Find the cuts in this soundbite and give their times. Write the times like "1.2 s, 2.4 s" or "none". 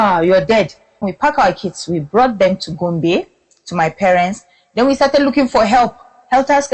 1.0 s